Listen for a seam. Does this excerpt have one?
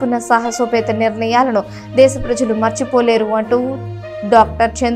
no; 0 cuts

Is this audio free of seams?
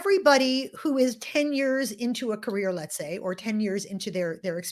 yes; 0 cuts

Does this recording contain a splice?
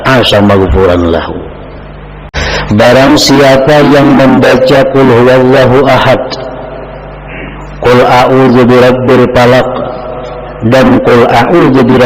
yes; 1 cut; at 2.3 s

